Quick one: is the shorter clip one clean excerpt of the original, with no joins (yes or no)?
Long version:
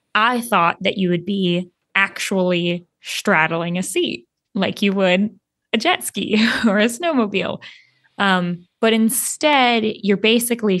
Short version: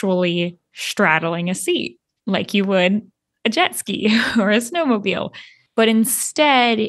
no